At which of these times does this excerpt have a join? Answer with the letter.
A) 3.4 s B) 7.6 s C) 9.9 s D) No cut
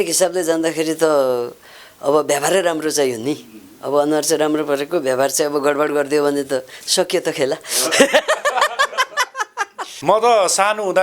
C